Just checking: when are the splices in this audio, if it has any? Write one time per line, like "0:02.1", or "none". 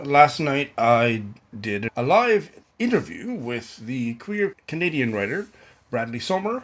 0:01.9
0:02.6
0:04.6